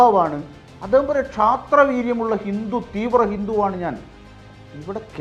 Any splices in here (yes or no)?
no